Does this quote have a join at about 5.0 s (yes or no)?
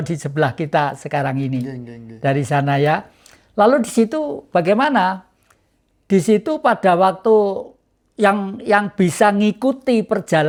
no